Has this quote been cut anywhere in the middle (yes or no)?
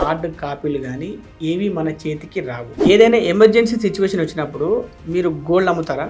yes